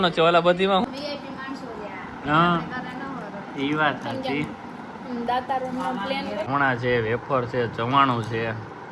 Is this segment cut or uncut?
cut